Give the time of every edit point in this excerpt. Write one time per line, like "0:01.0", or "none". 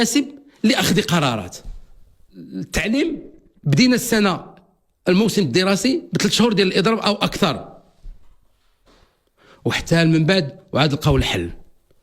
0:02.6